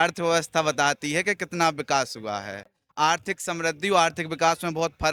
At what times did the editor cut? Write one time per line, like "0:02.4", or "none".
none